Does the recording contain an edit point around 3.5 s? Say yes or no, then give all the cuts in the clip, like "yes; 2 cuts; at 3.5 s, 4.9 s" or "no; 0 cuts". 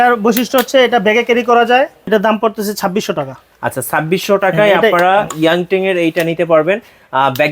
no; 1 cut; at 2.0 s